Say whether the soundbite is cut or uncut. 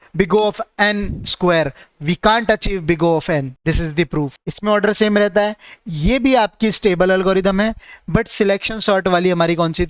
cut